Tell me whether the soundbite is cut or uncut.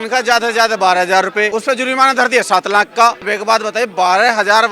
cut